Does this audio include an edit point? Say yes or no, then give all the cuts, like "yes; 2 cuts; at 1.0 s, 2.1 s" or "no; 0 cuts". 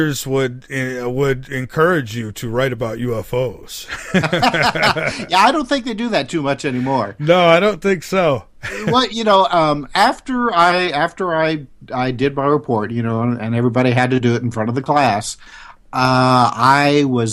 no; 0 cuts